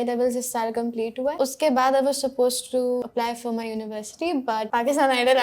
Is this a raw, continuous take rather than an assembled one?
no; 3 cuts; at 1.3 s, 3.0 s, 4.7 s

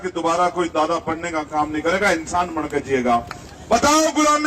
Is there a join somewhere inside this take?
yes; 1 cut; at 3.4 s

